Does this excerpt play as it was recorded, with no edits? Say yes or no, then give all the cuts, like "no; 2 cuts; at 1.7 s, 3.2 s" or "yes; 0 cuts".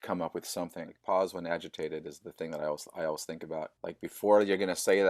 no; 1 cut; at 0.9 s